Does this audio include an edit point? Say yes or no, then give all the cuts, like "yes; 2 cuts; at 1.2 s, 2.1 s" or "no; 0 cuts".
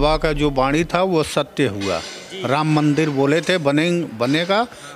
no; 0 cuts